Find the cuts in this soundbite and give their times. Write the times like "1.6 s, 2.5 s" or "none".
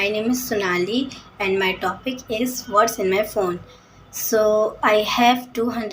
none